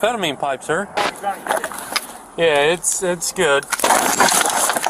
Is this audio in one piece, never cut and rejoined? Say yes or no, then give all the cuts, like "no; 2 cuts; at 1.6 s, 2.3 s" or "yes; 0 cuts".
no; 1 cut; at 1.0 s